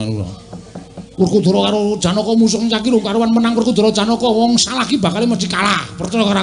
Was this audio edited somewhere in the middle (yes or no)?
yes